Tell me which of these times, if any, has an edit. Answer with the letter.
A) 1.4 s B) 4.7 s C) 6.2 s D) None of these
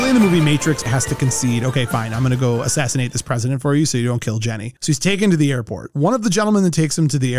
B